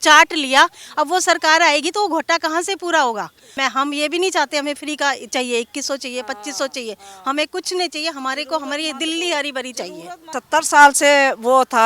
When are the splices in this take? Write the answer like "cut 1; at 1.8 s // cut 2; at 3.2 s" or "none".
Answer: cut 1; at 3.5 s // cut 2; at 10.3 s